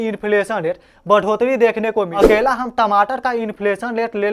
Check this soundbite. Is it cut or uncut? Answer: cut